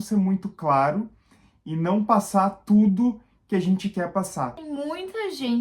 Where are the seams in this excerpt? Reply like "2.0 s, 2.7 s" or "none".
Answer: 4.6 s